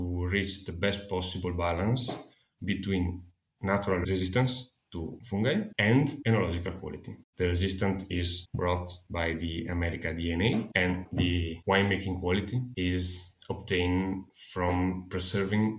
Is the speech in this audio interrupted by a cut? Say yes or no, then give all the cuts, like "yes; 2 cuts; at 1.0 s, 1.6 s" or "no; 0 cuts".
no; 0 cuts